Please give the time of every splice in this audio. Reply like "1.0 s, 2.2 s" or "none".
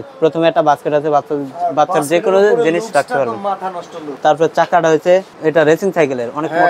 4.0 s, 5.3 s